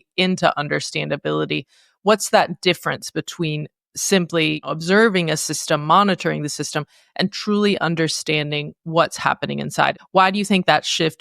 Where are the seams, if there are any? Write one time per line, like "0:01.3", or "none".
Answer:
0:04.7
0:09.9